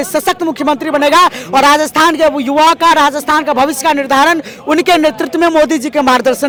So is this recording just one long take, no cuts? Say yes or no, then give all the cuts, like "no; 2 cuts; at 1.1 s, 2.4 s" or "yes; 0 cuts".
yes; 0 cuts